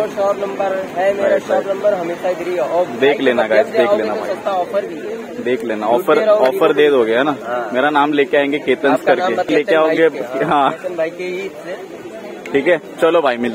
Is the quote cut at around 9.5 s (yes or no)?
yes